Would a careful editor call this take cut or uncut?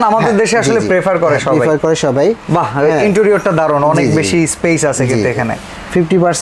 uncut